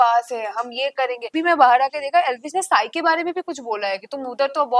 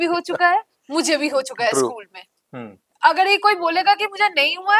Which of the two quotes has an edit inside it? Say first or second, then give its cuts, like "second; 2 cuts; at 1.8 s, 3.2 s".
first; 1 cut; at 1.4 s